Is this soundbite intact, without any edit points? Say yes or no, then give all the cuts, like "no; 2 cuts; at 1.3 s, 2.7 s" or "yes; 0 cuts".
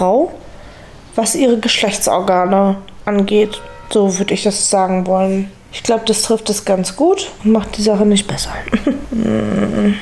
no; 2 cuts; at 7.3 s, 9.1 s